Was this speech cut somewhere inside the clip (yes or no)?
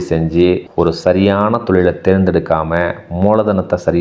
no